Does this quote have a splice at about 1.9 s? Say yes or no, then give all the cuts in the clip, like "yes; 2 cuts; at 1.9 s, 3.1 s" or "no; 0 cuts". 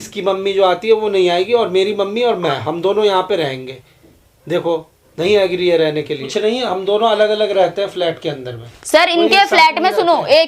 no; 1 cut; at 6.3 s